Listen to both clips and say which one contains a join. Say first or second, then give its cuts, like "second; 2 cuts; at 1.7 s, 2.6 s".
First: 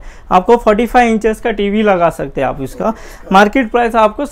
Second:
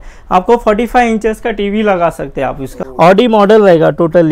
second; 1 cut; at 2.8 s